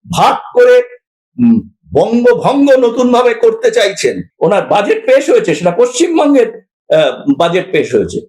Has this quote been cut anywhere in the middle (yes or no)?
yes